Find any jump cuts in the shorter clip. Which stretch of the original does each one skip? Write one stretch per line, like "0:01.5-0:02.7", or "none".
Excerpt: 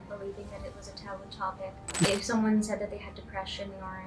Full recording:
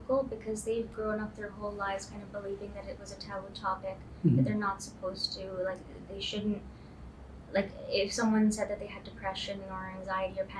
0:04.3-0:07.9